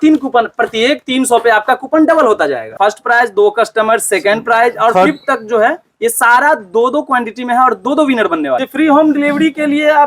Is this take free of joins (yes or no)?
no